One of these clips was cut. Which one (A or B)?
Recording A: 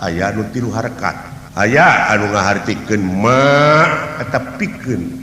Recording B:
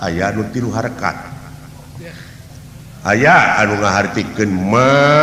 A